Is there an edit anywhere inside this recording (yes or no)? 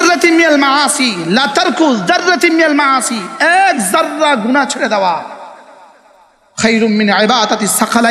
no